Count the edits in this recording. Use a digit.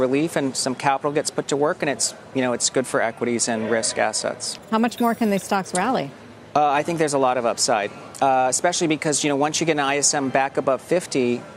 1